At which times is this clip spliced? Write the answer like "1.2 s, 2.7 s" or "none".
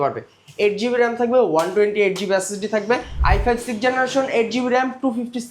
3.1 s